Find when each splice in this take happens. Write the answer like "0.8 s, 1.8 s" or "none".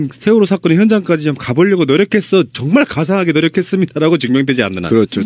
3.7 s